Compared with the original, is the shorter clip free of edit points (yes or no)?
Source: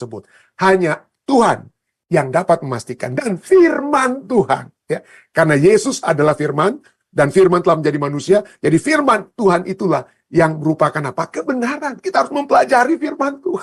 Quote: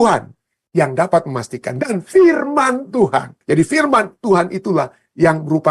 no